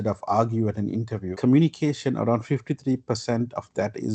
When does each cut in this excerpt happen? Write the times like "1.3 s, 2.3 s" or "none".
1.3 s